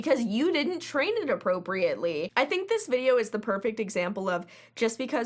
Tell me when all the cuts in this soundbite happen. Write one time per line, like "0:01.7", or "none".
0:02.3

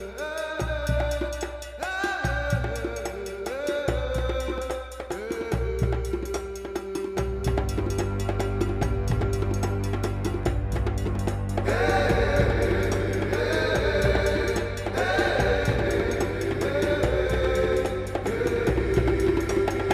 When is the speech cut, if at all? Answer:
none

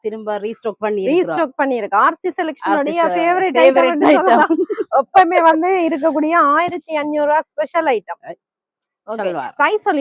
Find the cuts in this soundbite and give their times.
none

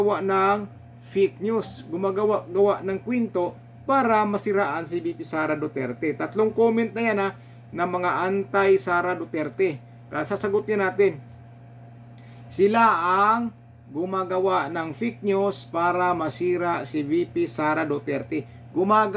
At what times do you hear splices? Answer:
none

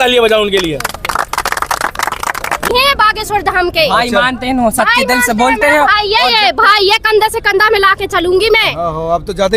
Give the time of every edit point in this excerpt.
0:02.7

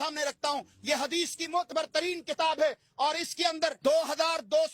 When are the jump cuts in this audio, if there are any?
0:03.8

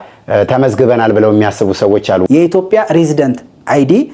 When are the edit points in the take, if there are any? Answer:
0:02.2

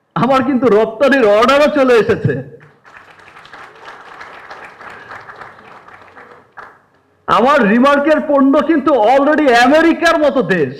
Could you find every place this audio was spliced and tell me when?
none

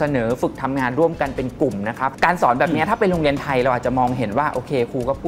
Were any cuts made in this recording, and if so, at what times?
0:02.1

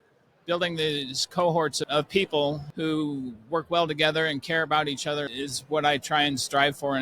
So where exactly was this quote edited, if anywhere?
0:01.8
0:02.7
0:05.3

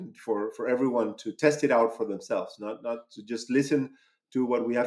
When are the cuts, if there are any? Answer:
none

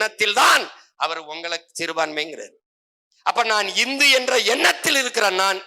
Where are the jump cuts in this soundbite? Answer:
none

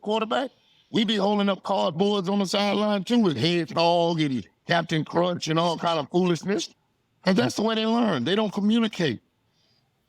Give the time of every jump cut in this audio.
none

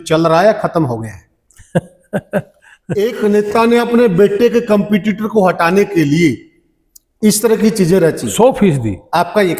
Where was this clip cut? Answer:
0:02.9

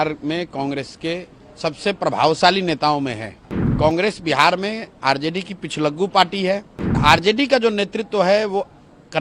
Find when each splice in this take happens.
0:03.7
0:07.0

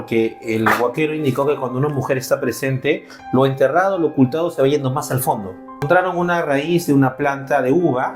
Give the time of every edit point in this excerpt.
0:05.9

